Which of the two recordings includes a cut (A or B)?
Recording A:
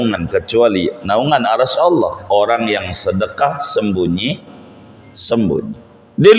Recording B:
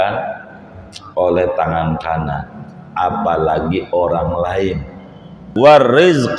B